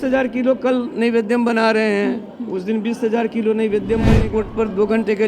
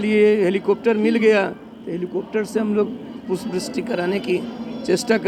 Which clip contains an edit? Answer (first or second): first